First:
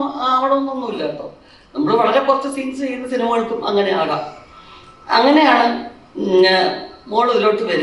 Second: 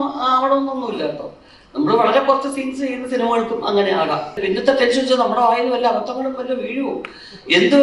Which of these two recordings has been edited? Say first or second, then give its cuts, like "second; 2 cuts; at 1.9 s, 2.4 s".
second; 1 cut; at 4.4 s